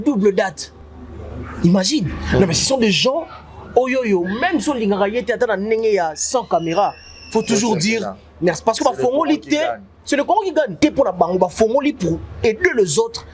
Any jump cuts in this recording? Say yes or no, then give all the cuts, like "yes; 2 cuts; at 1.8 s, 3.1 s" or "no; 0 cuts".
yes; 1 cut; at 10.7 s